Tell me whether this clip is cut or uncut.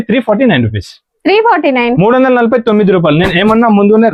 uncut